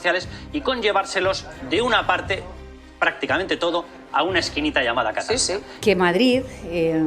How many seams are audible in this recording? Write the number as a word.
one